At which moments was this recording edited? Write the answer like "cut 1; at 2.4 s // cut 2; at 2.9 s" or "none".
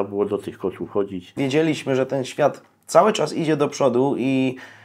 cut 1; at 1.4 s